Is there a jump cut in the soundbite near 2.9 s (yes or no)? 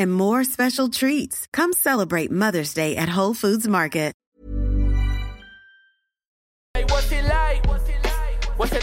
no